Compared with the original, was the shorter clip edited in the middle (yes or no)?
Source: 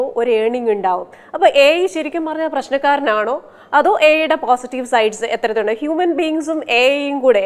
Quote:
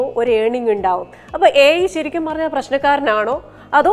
no